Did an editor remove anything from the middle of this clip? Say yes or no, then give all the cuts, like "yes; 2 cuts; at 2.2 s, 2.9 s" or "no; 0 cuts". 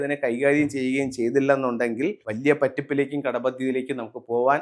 yes; 1 cut; at 2.3 s